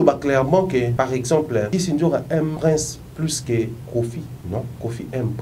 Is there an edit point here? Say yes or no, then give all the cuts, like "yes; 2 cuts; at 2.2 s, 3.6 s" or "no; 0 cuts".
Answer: yes; 4 cuts; at 0.9 s, 1.7 s, 2.6 s, 4.4 s